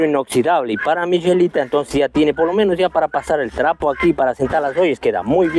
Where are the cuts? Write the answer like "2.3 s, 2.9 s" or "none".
none